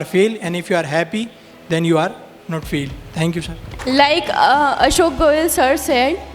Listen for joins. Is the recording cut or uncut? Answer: uncut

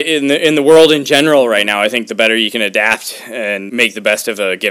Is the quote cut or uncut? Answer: cut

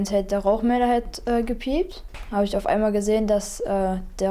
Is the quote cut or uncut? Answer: cut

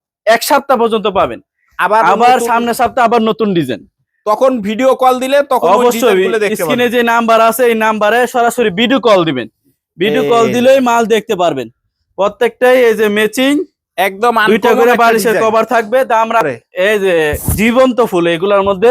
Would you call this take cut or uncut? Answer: cut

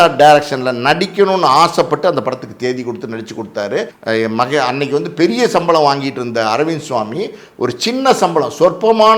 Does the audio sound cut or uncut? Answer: cut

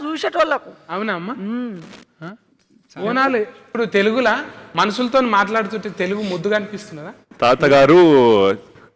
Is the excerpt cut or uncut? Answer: cut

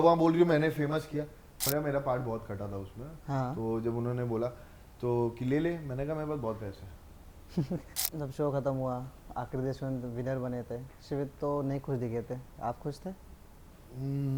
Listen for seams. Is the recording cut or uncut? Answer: cut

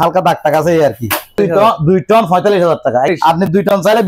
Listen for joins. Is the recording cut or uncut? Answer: cut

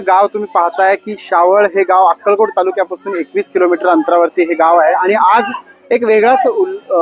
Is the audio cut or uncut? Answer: uncut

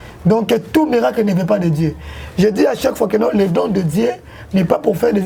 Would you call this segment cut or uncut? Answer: uncut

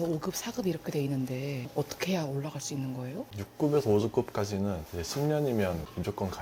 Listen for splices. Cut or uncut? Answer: cut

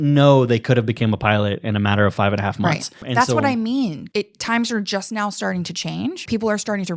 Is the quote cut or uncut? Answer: cut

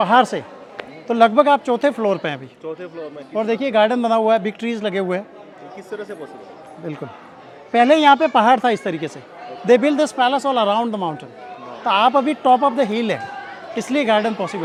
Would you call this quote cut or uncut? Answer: uncut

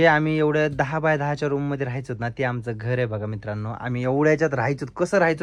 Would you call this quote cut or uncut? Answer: uncut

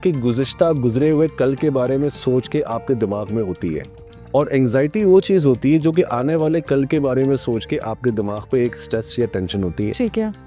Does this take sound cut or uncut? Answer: uncut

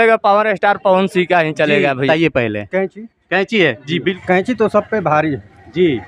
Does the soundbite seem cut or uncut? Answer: cut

